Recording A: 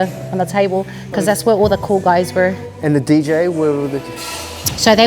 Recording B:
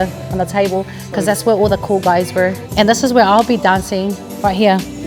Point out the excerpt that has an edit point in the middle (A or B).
B